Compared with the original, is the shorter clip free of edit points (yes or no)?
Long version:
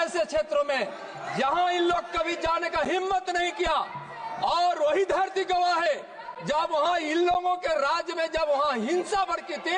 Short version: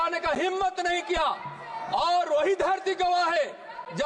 yes